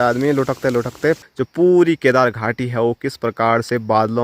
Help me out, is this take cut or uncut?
cut